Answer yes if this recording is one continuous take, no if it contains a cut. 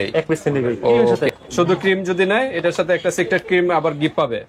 no